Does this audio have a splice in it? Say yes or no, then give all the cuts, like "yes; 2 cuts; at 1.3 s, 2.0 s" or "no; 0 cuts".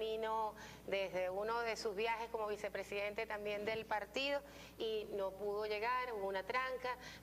no; 0 cuts